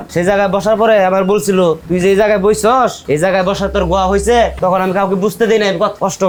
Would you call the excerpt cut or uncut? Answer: uncut